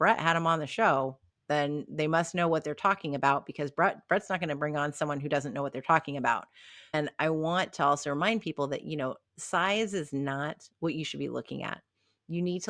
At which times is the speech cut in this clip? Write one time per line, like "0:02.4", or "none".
0:06.9